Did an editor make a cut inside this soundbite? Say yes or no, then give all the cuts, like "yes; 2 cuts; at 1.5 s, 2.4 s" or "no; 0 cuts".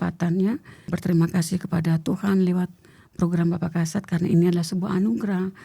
yes; 1 cut; at 0.9 s